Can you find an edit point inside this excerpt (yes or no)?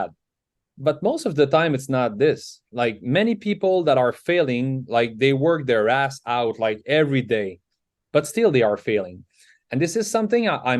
no